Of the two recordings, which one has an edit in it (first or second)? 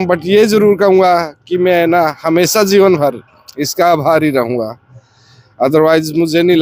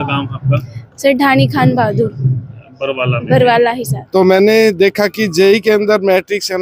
second